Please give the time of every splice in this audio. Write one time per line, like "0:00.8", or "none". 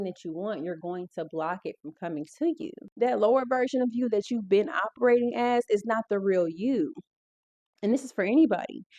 0:02.8